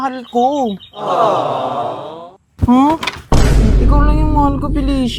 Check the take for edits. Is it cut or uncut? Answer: uncut